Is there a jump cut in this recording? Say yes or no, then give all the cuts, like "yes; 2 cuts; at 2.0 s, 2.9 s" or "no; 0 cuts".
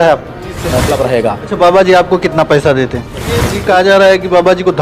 yes; 2 cuts; at 0.8 s, 3.5 s